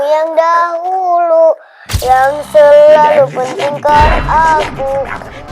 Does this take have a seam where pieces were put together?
no; 0 cuts

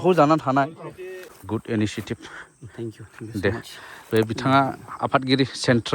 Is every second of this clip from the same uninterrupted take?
no; 1 cut; at 1.3 s

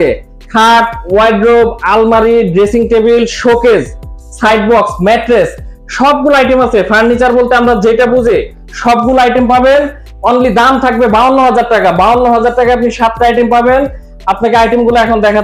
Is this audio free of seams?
yes; 0 cuts

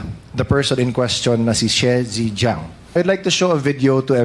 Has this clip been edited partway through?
yes; 1 cut; at 2.8 s

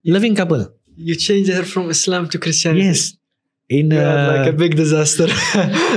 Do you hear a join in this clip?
no; 0 cuts

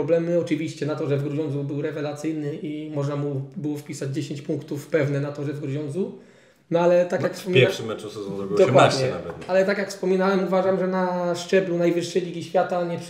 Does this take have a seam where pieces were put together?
no; 0 cuts

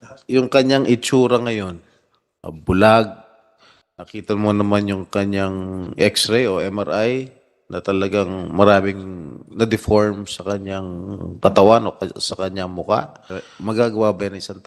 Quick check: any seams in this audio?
yes; 1 cut; at 13.4 s

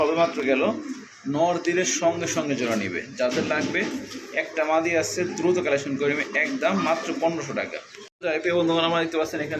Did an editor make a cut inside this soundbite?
no; 0 cuts

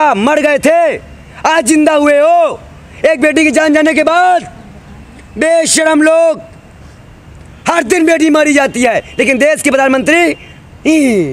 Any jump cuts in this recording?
no; 0 cuts

